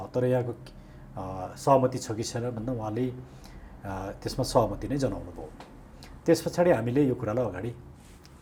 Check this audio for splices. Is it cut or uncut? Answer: uncut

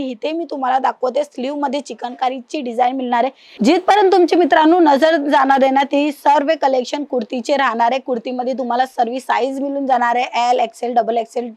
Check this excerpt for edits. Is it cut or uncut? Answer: cut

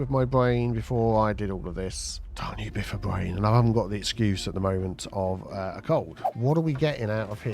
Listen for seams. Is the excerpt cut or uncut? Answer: cut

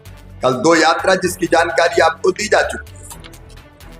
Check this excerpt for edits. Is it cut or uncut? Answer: cut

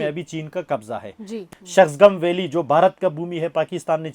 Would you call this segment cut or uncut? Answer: cut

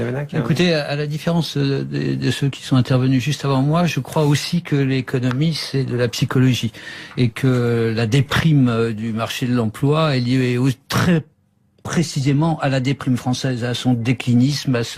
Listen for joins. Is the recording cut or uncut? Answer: uncut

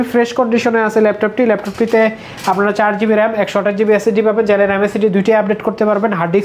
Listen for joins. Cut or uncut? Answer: uncut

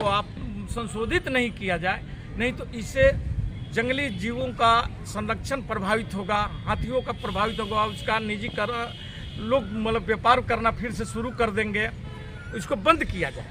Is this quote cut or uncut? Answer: uncut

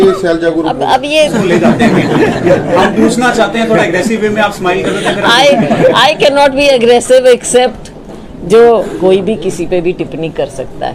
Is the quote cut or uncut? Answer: cut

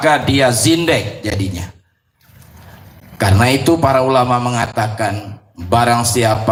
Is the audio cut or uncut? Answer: uncut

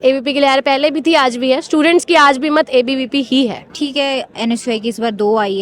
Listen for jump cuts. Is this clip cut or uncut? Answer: cut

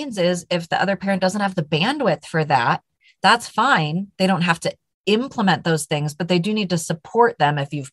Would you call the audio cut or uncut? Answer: uncut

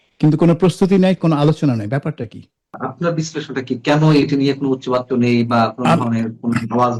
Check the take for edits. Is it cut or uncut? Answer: cut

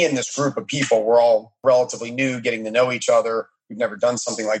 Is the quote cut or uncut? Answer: cut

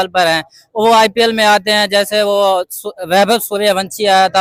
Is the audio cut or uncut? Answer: uncut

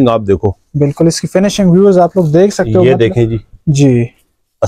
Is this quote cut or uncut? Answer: uncut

